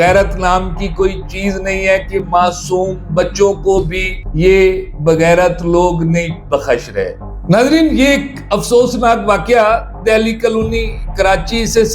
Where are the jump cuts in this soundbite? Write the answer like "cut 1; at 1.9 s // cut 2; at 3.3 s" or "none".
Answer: cut 1; at 7.3 s